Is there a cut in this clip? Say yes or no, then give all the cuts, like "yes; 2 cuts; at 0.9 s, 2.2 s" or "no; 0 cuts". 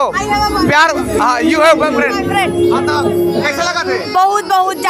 no; 0 cuts